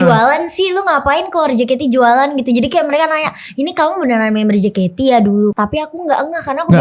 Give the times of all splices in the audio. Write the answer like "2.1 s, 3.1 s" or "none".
5.6 s